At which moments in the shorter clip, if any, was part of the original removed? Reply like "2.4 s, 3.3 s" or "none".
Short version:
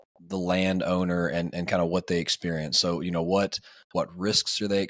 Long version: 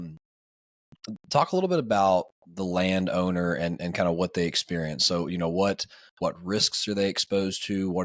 none